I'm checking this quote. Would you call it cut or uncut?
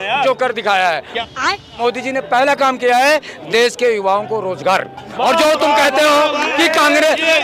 cut